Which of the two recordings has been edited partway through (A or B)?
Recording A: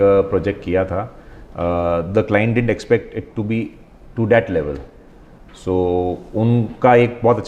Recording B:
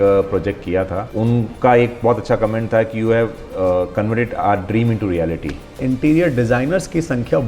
B